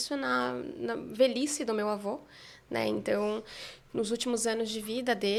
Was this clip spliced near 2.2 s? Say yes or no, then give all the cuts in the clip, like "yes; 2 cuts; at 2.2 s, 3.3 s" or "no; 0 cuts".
no; 0 cuts